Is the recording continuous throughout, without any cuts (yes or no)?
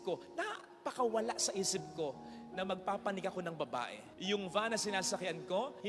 no